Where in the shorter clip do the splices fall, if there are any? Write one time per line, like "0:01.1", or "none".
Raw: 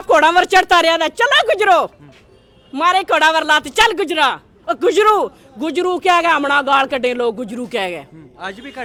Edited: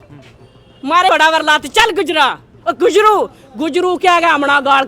0:01.1

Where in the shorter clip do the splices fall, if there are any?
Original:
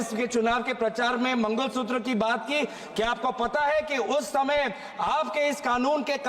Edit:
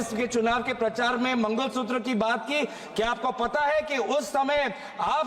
none

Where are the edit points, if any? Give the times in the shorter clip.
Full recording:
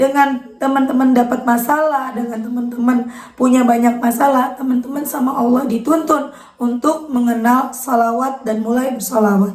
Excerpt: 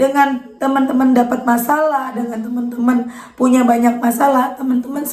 none

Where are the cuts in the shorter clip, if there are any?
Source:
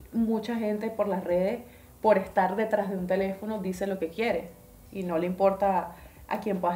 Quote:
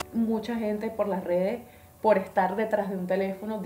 none

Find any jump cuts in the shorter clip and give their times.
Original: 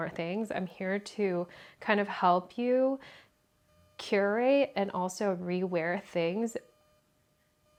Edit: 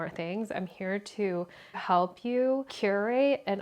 0:01.8
0:02.7

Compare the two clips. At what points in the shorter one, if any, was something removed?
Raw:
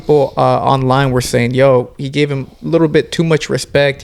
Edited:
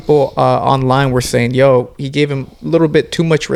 none

